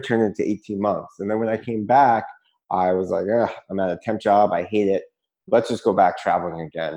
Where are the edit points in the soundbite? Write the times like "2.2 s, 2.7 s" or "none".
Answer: none